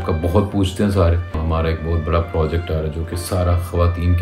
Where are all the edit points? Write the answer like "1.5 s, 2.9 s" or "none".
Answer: 1.4 s